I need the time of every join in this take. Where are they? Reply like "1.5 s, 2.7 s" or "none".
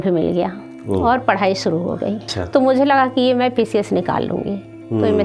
2.3 s